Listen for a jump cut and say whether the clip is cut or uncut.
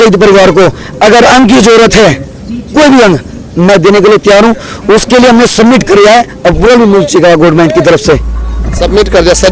uncut